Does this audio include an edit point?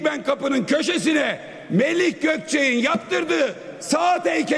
no; 0 cuts

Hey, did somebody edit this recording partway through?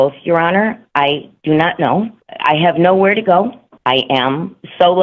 yes; 2 cuts; at 2.2 s, 3.7 s

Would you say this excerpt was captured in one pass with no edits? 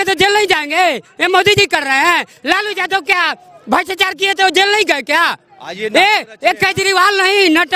yes; 0 cuts

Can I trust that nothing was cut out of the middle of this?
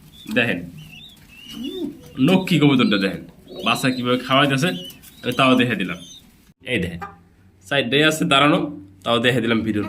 no; 1 cut; at 6.6 s

